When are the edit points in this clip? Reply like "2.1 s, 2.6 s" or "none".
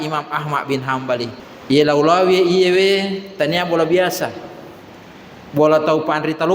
1.5 s